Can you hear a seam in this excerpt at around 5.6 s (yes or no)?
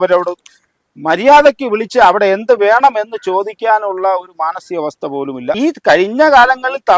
yes